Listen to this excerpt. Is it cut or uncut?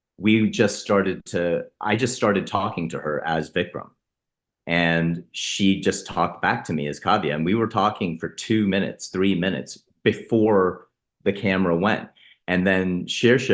uncut